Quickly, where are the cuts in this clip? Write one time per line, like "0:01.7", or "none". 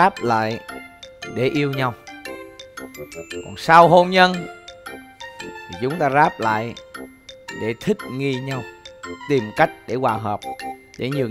none